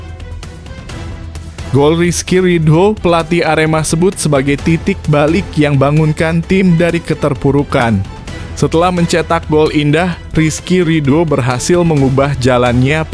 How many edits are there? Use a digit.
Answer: 1